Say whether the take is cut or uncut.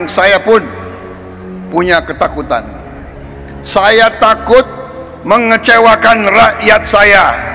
uncut